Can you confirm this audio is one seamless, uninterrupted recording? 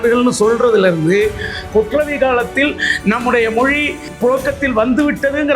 no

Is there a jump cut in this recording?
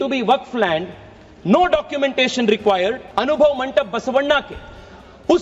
yes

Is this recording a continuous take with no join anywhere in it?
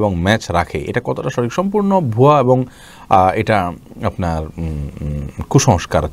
yes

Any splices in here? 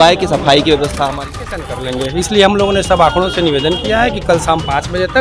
yes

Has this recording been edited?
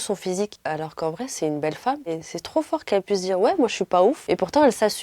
yes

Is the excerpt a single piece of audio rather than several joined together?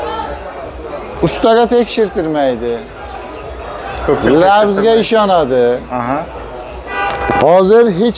yes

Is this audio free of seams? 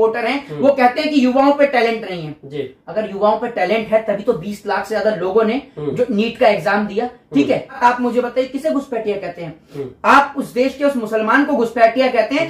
no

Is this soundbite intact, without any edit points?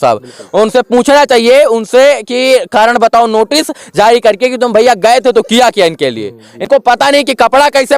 no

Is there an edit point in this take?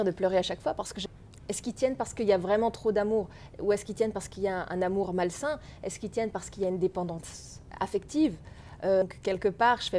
yes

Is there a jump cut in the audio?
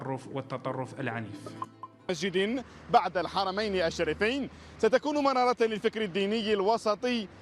no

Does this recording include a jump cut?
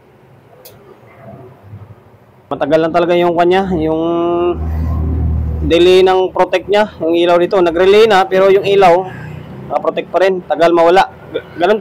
yes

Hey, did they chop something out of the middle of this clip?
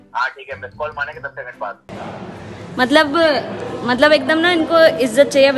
yes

